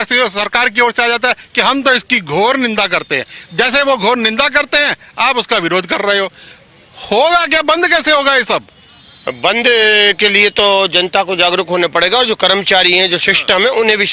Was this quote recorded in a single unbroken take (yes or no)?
yes